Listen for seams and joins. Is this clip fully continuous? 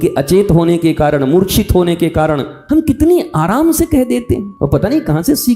no; 2 cuts; at 2.5 s, 4.5 s

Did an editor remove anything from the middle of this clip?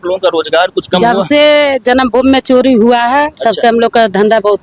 no; 0 cuts

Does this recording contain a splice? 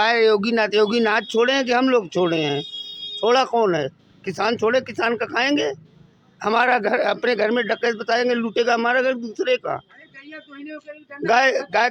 no; 0 cuts

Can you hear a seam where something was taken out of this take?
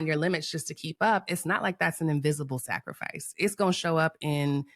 no; 0 cuts

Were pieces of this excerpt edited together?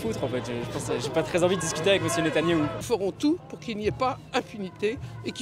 yes; 1 cut; at 2.8 s

